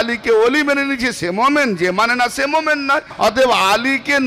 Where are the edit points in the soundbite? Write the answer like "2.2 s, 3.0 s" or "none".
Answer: 3.1 s